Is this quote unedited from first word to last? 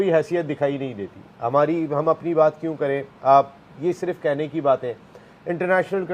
yes; 0 cuts

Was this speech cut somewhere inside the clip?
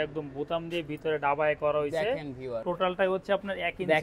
yes; 1 cut; at 2.6 s

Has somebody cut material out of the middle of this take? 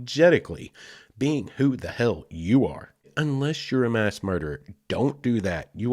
yes; 1 cut; at 3.1 s

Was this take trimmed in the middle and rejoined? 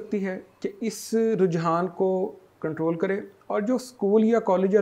no; 0 cuts

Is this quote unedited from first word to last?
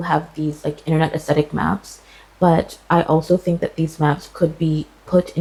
yes; 0 cuts

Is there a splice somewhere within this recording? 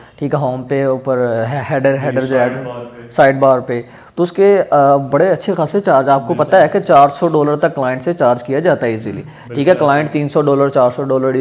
no; 0 cuts

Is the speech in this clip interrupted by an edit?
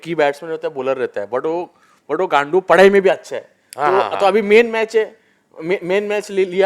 no; 0 cuts

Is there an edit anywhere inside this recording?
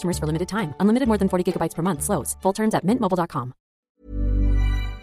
yes; 1 cut; at 3.9 s

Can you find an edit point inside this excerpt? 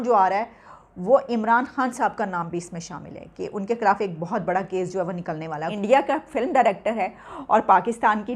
yes; 1 cut; at 5.7 s

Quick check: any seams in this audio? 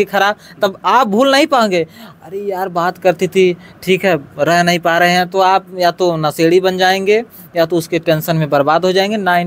no; 0 cuts

